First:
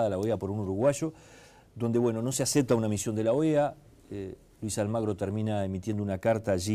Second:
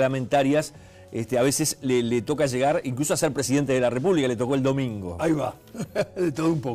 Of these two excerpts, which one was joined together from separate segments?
second; 1 cut; at 5.1 s

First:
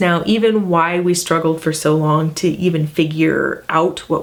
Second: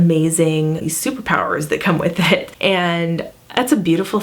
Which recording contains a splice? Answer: second; 2 cuts; at 0.8 s, 2.5 s

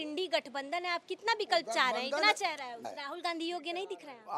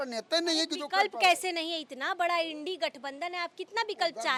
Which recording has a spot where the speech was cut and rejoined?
first; 1 cut; at 2.9 s

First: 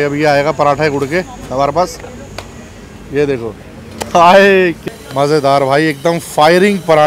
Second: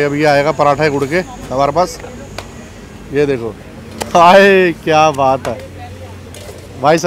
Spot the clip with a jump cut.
first; 1 cut; at 4.8 s

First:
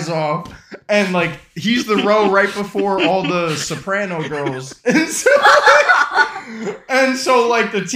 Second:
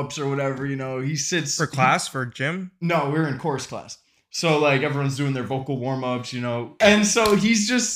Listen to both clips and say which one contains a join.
second; 1 cut; at 6.6 s

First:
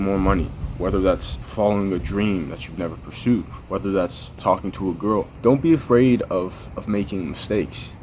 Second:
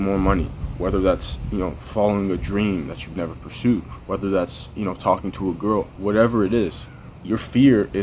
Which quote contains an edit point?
first; 3 cuts; at 1.4 s, 4.4 s, 5.6 s

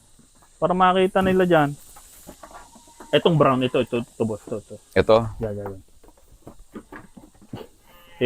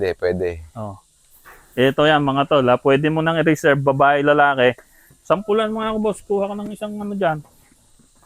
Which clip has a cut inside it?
first; 1 cut; at 1.8 s

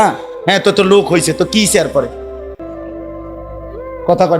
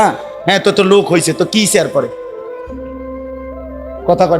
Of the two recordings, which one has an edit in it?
first; 2 cuts; at 2.3 s, 3.7 s

